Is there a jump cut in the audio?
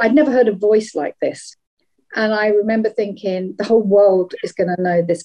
yes; 1 cut; at 1.5 s

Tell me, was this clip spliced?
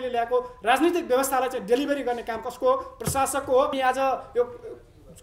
yes; 1 cut; at 3.7 s

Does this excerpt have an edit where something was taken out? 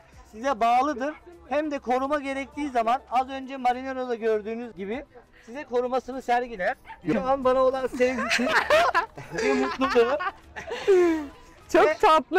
yes; 1 cut; at 7.1 s

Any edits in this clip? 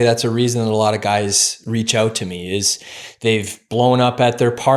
no; 0 cuts

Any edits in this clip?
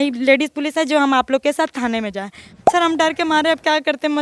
yes; 1 cut; at 2.5 s

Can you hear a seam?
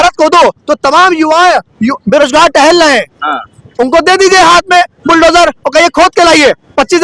no; 0 cuts

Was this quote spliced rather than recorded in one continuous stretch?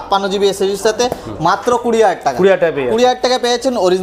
no; 0 cuts

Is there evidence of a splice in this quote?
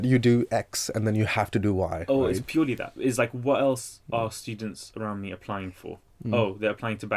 no; 0 cuts

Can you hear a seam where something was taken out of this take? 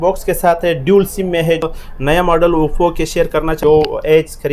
yes; 2 cuts; at 1.6 s, 3.6 s

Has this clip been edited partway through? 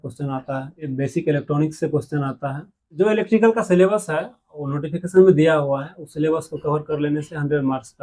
yes; 2 cuts; at 0.9 s, 2.8 s

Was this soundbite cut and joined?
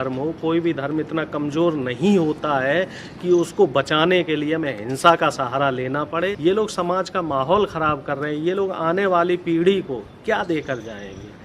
yes; 1 cut; at 6.3 s

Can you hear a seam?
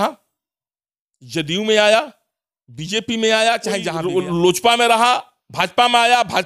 yes; 1 cut; at 3.9 s

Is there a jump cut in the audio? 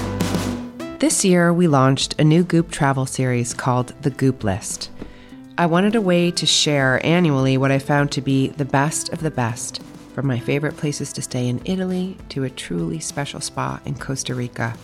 yes; 1 cut; at 0.9 s

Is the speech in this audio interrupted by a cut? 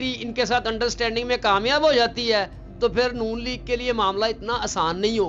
no; 0 cuts

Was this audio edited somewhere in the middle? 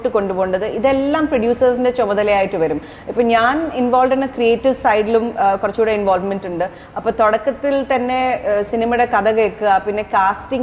no; 0 cuts

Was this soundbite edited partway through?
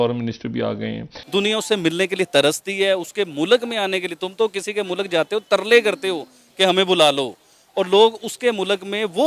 yes; 1 cut; at 1.1 s

